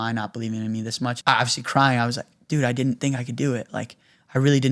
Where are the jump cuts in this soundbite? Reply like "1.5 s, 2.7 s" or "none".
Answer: 1.2 s